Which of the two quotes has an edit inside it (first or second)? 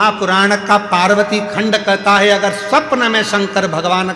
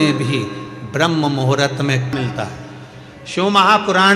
second